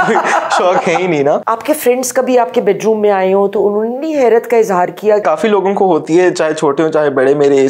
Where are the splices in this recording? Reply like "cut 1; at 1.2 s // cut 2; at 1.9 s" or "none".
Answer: cut 1; at 1.5 s // cut 2; at 5.2 s